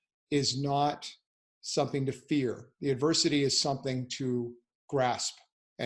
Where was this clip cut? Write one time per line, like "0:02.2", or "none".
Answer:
none